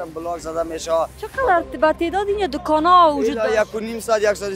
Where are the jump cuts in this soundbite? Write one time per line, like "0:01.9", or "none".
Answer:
0:01.2